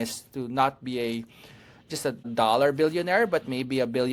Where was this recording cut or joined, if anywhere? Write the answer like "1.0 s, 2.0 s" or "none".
none